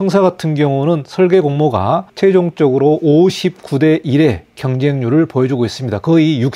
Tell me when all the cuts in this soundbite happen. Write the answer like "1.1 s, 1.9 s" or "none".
2.1 s